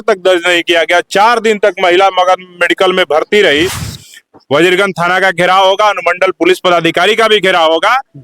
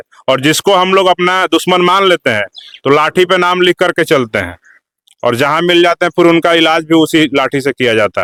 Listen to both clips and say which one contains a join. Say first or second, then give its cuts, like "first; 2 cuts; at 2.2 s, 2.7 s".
first; 1 cut; at 3.9 s